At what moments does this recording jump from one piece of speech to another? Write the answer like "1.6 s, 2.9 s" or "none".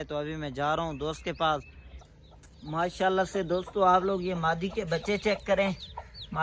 2.0 s